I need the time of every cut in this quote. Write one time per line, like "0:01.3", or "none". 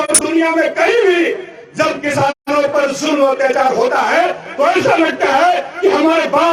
none